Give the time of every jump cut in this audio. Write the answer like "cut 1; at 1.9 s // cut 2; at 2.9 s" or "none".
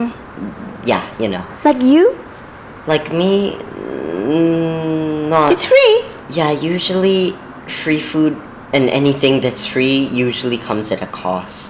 cut 1; at 6.2 s